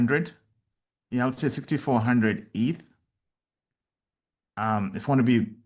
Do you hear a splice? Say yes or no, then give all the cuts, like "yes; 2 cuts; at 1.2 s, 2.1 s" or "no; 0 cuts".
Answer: no; 0 cuts